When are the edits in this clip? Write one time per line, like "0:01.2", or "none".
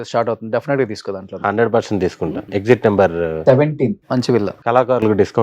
0:02.4
0:04.5

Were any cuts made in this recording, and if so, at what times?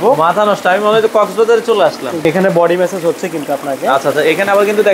0:02.2

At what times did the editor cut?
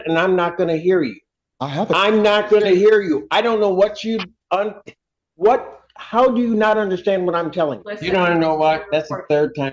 0:07.9

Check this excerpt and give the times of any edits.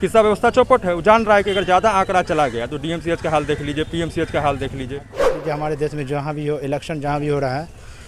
0:05.3

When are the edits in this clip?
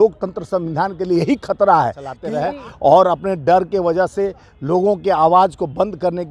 0:02.2

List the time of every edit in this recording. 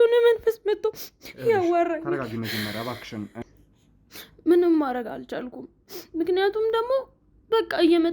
0:03.4

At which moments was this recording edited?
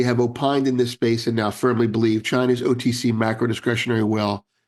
none

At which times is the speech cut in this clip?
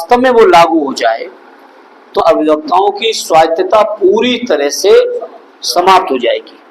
0:02.2

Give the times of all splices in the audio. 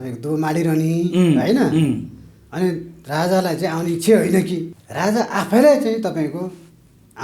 0:04.8

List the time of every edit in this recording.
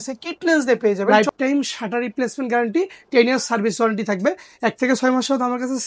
0:01.1

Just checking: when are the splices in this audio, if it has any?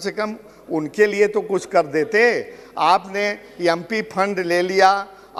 none

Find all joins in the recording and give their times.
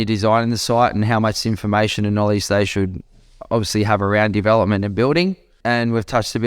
0:05.5

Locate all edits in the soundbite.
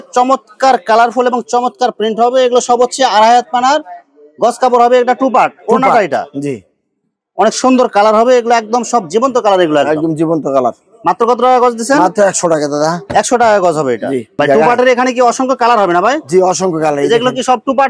none

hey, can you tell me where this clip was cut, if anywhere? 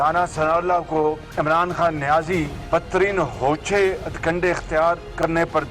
none

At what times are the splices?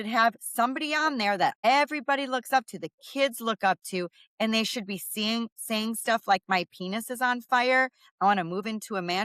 0:01.7

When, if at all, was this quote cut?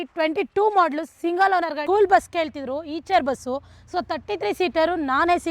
0:01.8

